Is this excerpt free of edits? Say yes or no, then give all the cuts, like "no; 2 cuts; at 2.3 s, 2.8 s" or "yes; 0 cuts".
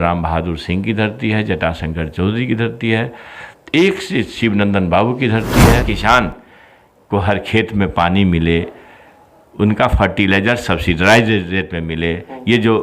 no; 1 cut; at 5.8 s